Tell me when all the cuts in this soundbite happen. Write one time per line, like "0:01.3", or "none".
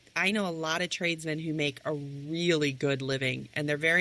none